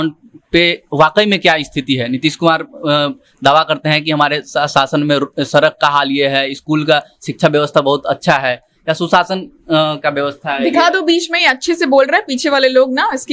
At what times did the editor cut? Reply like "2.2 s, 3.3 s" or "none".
none